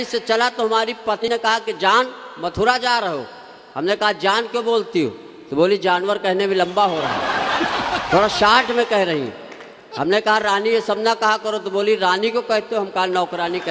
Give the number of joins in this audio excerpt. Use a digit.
1